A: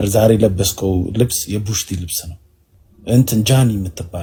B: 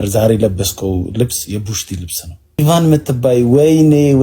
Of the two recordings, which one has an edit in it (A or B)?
B